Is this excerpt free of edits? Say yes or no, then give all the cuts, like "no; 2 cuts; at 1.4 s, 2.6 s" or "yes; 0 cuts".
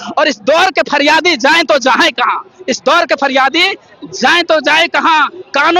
yes; 0 cuts